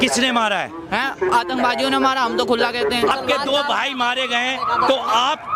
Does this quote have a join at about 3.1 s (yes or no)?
yes